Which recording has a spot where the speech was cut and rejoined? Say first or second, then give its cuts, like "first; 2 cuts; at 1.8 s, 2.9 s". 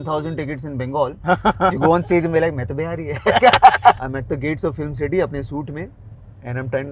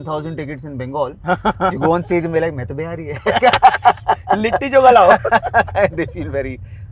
first; 1 cut; at 4.0 s